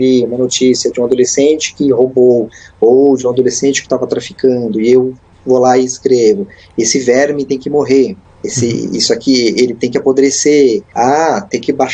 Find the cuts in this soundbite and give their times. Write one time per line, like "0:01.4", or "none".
none